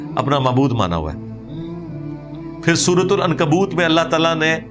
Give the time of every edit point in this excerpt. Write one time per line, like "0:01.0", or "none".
none